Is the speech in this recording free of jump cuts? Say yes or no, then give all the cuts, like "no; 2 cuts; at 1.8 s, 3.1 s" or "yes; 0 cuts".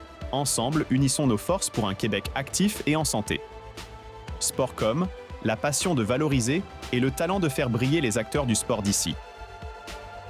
no; 1 cut; at 9.2 s